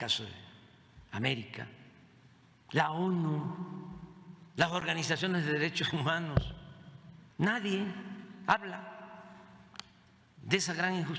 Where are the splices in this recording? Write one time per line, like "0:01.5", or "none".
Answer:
none